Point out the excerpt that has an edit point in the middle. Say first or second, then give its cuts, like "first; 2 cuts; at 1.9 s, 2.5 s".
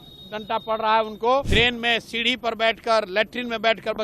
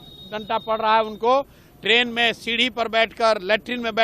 first; 1 cut; at 1.5 s